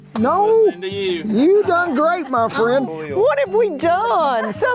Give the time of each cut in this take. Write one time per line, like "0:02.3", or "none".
0:02.9